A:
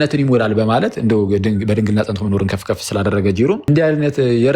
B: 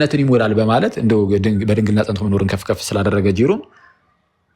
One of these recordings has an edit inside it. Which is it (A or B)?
A